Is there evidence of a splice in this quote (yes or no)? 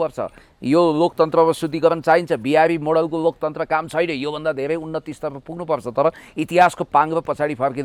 no